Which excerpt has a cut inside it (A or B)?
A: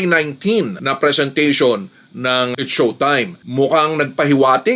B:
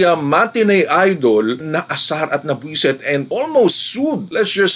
A